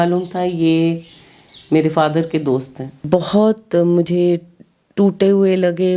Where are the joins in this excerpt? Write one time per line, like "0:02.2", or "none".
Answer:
0:03.0